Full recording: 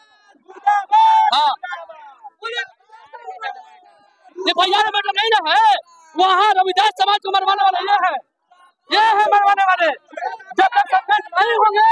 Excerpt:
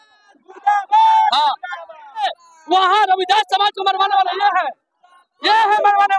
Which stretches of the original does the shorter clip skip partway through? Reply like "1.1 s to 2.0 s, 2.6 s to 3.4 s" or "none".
2.2 s to 5.7 s